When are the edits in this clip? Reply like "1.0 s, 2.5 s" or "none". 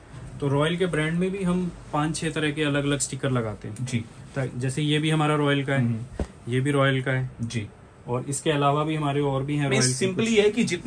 none